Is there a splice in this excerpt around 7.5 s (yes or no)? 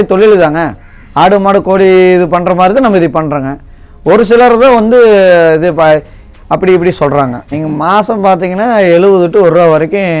yes